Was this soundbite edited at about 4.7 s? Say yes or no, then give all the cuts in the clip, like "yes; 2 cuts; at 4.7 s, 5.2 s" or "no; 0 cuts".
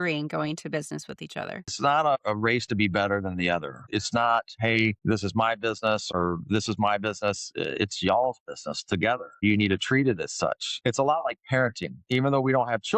no; 2 cuts; at 1.7 s, 10.7 s